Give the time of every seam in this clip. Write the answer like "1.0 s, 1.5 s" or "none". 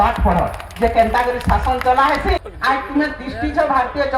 2.5 s